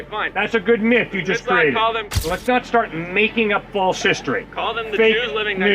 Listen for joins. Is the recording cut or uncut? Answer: cut